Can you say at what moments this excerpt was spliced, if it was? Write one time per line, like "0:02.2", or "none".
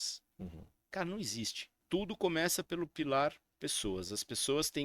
0:01.8